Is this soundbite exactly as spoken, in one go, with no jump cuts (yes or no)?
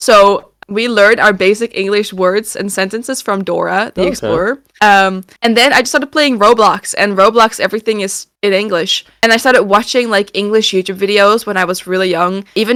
yes